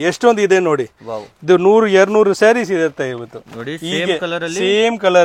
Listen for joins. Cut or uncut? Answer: uncut